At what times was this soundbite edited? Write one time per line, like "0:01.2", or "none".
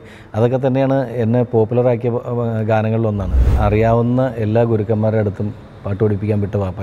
0:03.5